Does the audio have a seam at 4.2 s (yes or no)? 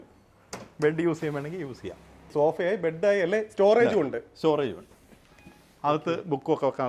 no